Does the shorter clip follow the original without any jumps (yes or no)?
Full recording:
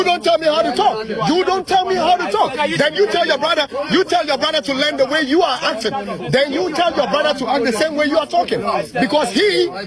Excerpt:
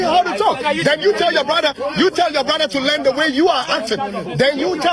yes